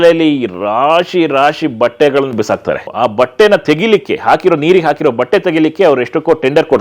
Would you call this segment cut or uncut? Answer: uncut